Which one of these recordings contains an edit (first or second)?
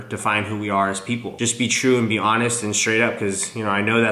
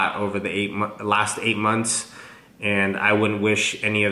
first